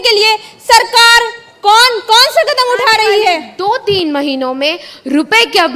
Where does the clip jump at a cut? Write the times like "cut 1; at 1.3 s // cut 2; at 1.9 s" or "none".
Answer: cut 1; at 3.5 s